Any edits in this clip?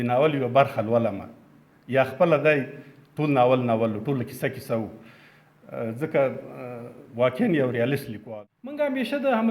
yes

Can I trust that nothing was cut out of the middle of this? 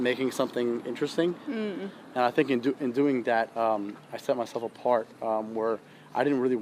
yes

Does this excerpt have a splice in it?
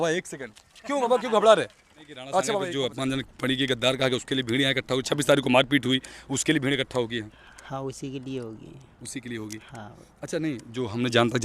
yes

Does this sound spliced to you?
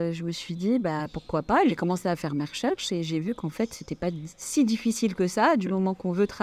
no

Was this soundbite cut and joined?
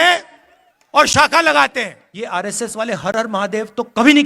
yes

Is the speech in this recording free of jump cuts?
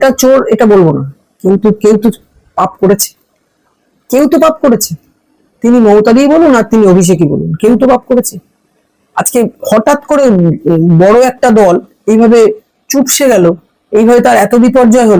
yes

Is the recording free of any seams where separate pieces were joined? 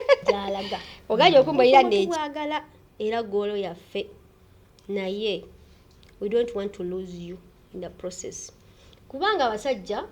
no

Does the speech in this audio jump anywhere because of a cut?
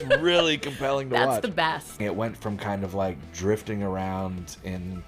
yes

